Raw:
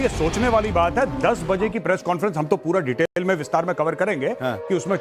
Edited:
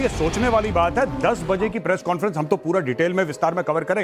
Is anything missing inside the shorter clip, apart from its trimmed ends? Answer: yes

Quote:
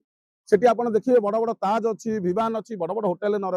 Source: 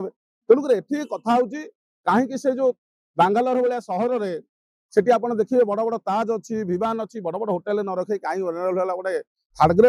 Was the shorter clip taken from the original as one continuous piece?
yes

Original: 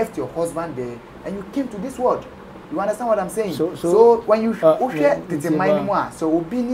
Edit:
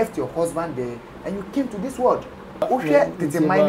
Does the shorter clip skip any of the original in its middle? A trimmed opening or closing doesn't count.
yes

